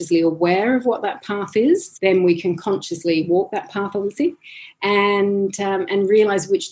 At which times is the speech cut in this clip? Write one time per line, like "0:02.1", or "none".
0:01.9

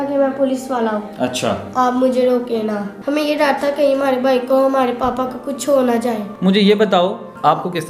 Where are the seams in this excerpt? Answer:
0:02.9
0:06.3

